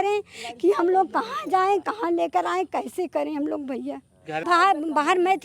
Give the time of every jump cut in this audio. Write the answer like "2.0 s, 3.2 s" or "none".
4.5 s